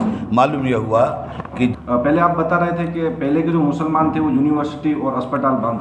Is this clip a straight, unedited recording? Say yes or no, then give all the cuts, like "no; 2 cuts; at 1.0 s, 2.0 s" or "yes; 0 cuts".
no; 1 cut; at 1.8 s